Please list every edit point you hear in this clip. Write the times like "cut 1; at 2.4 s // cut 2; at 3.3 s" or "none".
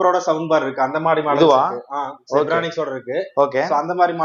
none